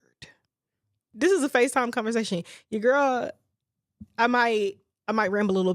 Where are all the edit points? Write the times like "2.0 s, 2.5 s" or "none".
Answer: 0.9 s

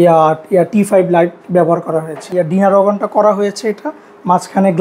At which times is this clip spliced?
2.2 s

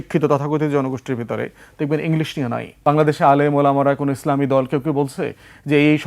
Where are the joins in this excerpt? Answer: 2.7 s

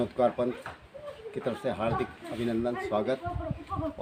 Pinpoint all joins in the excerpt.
none

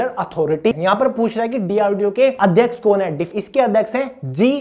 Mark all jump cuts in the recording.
0.7 s, 2.4 s, 3.3 s

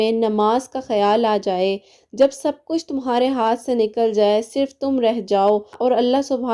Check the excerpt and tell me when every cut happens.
none

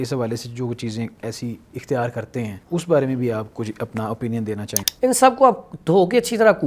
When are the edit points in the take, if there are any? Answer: 2.6 s, 4.7 s

